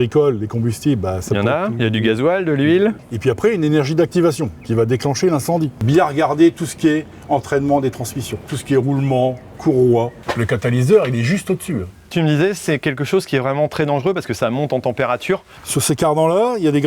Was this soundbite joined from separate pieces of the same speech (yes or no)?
yes